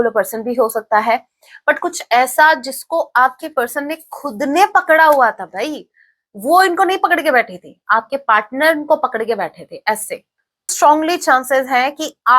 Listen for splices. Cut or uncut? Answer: cut